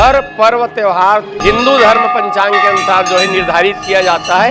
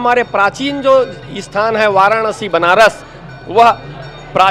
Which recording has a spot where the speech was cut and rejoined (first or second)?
first